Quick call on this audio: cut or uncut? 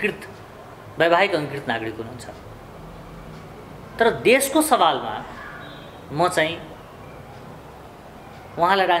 uncut